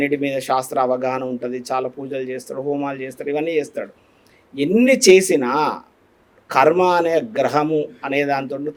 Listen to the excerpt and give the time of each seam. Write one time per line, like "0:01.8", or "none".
none